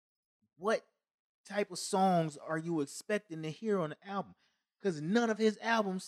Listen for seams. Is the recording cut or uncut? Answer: uncut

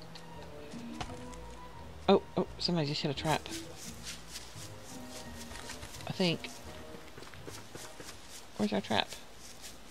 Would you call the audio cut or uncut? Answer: cut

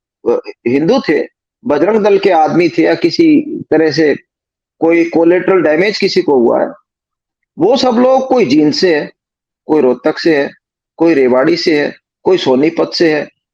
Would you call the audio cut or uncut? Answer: uncut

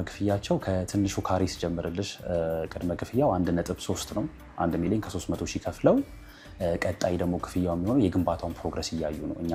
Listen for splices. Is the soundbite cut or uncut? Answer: uncut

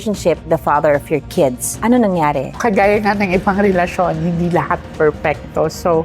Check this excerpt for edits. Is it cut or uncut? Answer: cut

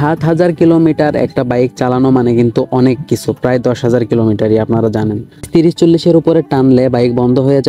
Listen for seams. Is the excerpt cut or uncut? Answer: cut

